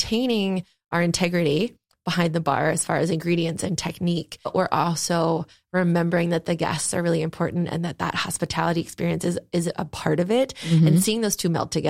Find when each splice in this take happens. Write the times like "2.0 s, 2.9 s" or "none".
4.5 s